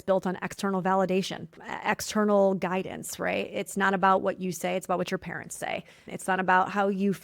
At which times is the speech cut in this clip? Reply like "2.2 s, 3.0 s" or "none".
1.6 s, 6.1 s